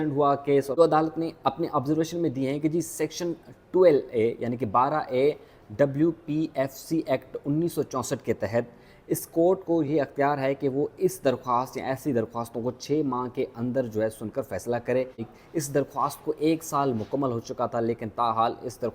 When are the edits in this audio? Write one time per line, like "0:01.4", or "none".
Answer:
0:00.8
0:15.2